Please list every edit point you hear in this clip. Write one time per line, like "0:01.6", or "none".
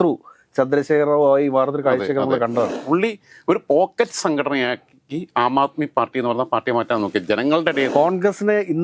0:02.8
0:07.9